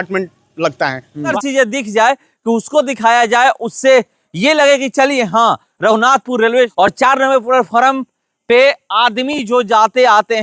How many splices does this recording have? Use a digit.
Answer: 2